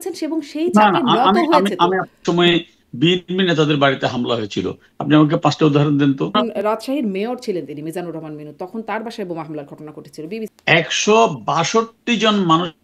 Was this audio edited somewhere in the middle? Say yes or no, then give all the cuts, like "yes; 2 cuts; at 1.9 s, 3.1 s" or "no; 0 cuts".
yes; 3 cuts; at 2.2 s, 6.3 s, 10.5 s